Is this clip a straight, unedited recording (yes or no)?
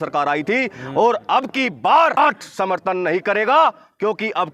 no